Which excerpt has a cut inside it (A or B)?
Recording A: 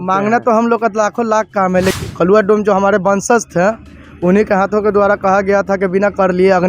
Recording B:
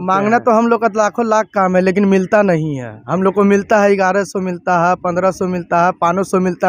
A